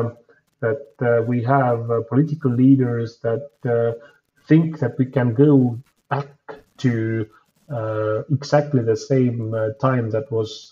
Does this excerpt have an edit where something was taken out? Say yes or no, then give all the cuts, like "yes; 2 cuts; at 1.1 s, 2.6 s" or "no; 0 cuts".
no; 0 cuts